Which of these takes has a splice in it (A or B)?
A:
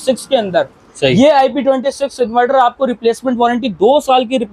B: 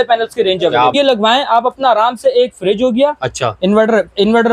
B